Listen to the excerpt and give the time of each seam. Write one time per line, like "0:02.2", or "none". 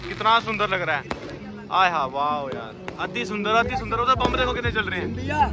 none